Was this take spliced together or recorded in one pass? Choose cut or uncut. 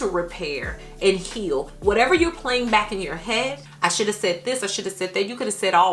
cut